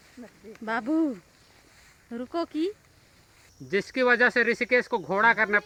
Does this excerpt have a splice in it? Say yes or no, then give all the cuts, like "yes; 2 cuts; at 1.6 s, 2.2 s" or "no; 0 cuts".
no; 0 cuts